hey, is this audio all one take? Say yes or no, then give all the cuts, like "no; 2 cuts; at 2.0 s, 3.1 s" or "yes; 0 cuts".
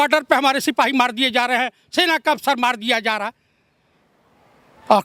yes; 0 cuts